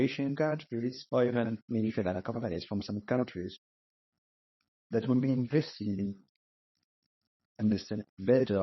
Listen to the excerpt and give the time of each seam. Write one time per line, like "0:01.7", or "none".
0:01.0
0:01.6